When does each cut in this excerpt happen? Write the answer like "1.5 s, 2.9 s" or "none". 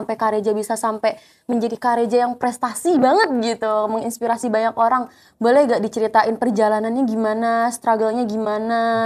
none

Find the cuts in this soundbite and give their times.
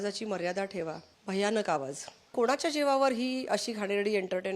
1.1 s, 2.3 s

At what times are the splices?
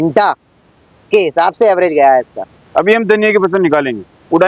none

